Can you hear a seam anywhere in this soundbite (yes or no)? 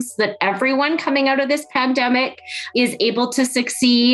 yes